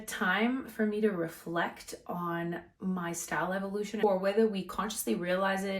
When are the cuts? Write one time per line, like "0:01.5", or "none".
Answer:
0:04.0